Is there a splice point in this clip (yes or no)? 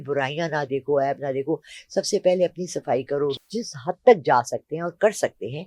yes